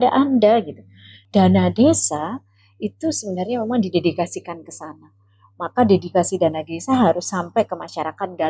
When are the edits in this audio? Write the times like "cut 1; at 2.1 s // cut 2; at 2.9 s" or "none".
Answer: cut 1; at 1.2 s